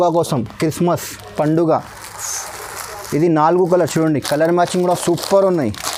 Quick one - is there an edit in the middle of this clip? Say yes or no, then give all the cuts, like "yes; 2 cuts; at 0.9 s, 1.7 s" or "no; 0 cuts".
no; 0 cuts